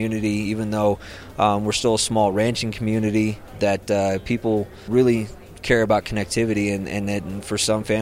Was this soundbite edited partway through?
yes; 2 cuts; at 3.5 s, 4.8 s

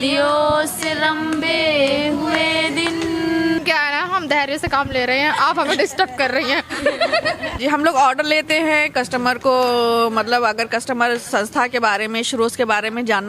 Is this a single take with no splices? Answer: no; 2 cuts; at 3.6 s, 7.6 s

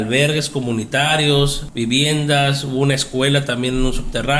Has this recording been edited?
yes; 1 cut; at 1.6 s

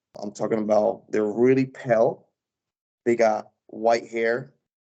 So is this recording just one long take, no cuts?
yes; 0 cuts

